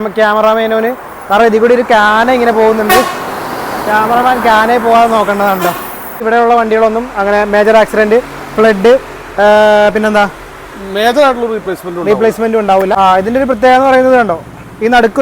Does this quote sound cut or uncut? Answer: cut